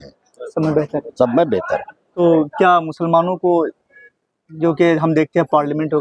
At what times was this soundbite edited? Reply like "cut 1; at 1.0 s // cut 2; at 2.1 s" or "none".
cut 1; at 2.2 s